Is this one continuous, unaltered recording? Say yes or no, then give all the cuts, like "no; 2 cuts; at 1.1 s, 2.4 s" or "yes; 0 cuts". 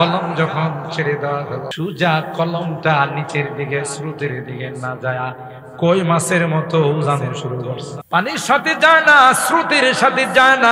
no; 2 cuts; at 1.7 s, 7.9 s